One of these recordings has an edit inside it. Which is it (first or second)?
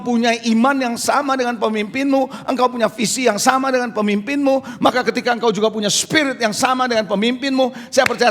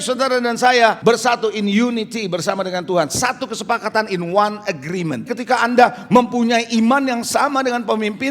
second